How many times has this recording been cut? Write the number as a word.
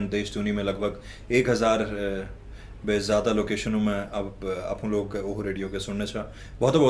zero